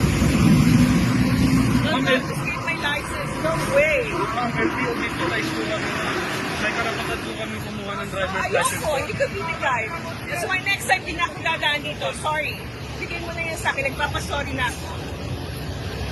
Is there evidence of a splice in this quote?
no; 0 cuts

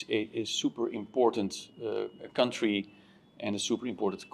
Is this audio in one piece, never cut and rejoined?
yes; 0 cuts

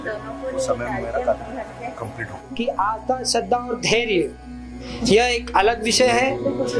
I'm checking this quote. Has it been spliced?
yes; 1 cut; at 2.3 s

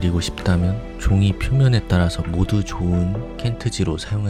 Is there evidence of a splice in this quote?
no; 0 cuts

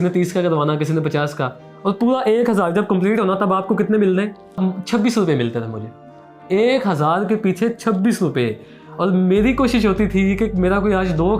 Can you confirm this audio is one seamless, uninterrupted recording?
no; 1 cut; at 4.6 s

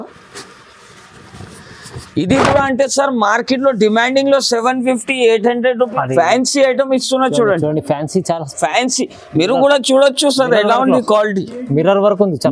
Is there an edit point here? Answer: yes; 1 cut; at 5.9 s

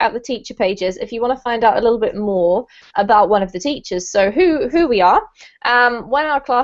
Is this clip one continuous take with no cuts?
yes; 0 cuts

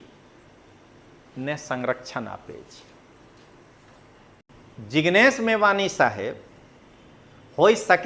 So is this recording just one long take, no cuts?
no; 1 cut; at 4.4 s

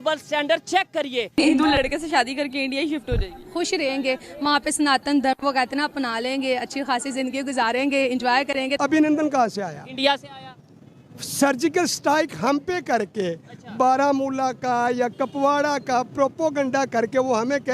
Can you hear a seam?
yes; 1 cut; at 8.7 s

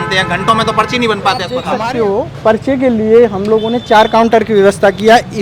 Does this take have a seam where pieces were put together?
yes; 1 cut; at 1.6 s

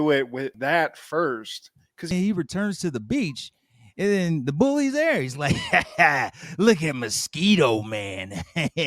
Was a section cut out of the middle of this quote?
yes; 1 cut; at 2.1 s

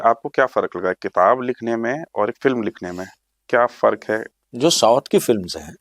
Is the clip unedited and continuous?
no; 1 cut; at 4.4 s

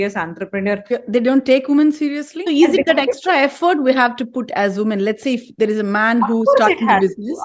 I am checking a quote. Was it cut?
yes; 2 cuts; at 0.9 s, 2.3 s

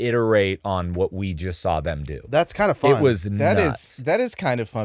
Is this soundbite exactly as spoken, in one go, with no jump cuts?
yes; 0 cuts

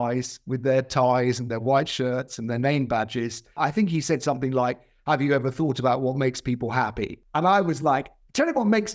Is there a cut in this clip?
yes; 2 cuts; at 3.6 s, 7.2 s

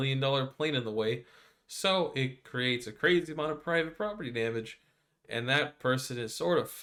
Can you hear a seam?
no; 0 cuts

